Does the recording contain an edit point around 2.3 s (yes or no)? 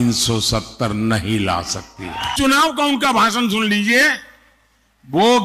yes